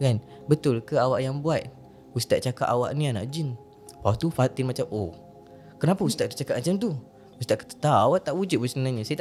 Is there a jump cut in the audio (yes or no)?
no